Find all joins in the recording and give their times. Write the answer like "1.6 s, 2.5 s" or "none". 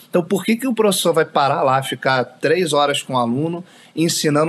none